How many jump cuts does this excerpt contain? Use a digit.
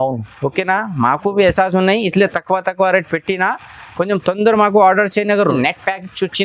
1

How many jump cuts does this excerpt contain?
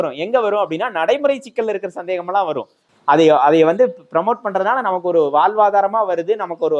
1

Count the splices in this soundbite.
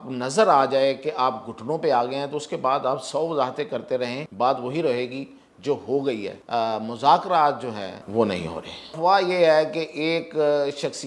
4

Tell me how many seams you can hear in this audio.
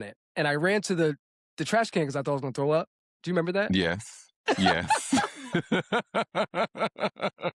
0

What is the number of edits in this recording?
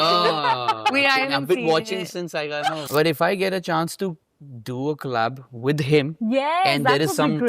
1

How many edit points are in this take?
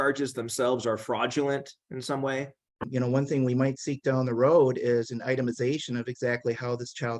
1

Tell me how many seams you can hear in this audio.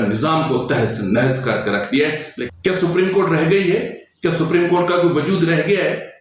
1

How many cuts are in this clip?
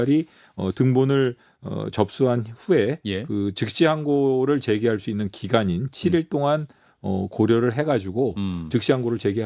0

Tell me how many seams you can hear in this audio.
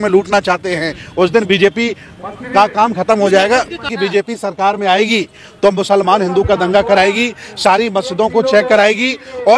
1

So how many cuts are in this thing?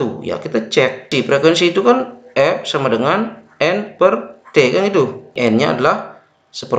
2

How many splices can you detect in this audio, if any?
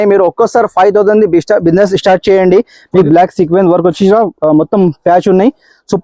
1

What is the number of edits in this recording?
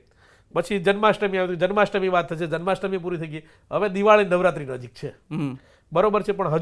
0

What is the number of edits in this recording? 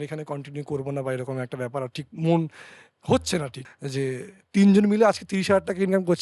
1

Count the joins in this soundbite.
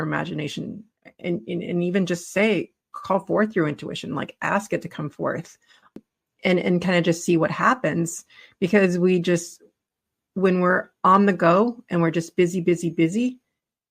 1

